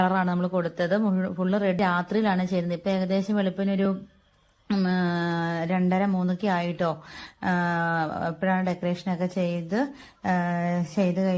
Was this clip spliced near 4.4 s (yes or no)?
no